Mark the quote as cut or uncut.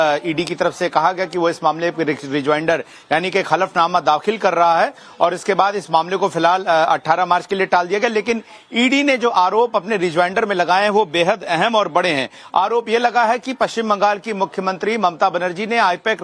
cut